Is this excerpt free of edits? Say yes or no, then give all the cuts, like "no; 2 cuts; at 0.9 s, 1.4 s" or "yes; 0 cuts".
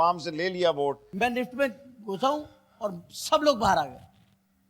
no; 1 cut; at 1.0 s